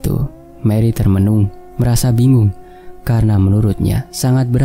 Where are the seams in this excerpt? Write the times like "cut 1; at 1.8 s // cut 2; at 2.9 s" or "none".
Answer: none